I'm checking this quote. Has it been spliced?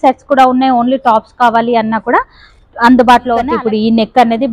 yes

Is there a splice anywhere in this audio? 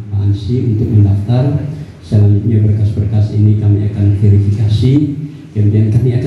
no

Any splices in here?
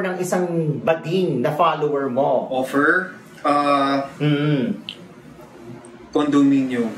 no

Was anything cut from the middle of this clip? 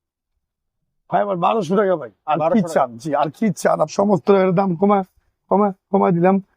yes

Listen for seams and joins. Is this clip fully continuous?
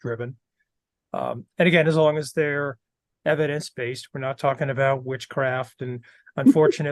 yes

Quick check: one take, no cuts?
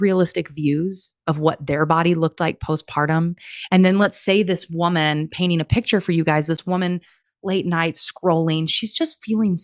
yes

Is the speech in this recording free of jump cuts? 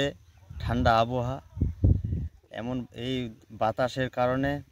yes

